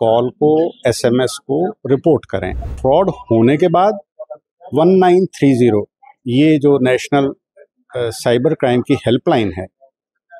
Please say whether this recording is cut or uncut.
cut